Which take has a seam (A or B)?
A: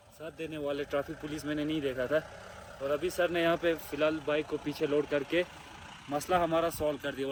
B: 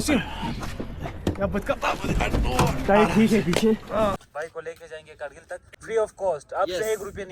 B